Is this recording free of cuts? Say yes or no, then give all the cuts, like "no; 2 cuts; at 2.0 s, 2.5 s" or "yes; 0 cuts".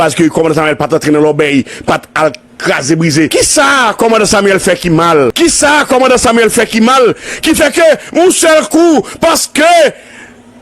no; 2 cuts; at 3.3 s, 5.3 s